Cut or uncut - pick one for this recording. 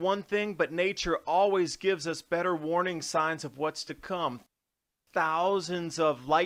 uncut